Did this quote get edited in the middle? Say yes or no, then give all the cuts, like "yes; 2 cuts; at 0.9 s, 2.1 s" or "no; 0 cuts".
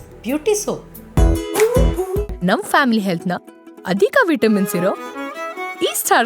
yes; 1 cut; at 0.9 s